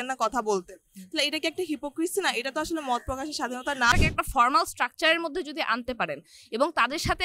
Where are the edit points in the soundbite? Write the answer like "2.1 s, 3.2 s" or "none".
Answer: 3.9 s